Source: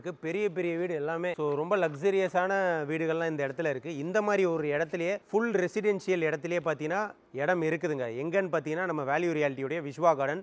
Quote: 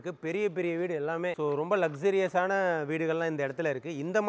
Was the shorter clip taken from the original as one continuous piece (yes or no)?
yes